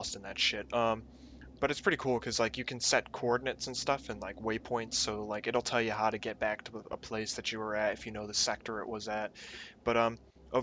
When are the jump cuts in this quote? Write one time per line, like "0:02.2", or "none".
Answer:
0:09.7